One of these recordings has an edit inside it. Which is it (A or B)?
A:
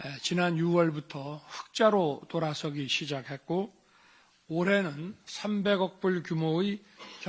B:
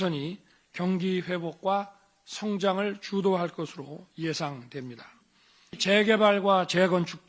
B